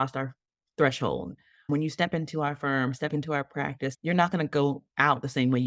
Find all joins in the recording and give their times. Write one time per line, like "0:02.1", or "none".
0:01.7
0:03.9